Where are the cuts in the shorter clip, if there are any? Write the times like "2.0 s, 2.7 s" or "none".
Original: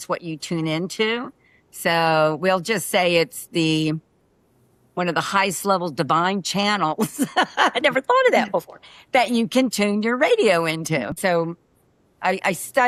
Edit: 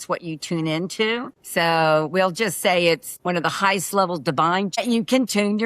1.4 s, 3.1 s, 4.8 s